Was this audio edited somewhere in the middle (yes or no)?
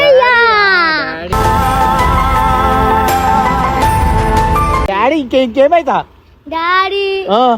no